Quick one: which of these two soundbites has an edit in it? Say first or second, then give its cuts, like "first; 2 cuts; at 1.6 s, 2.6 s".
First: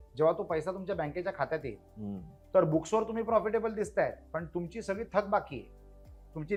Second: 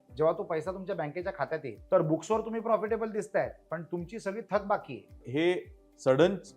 second; 2 cuts; at 1.7 s, 5.2 s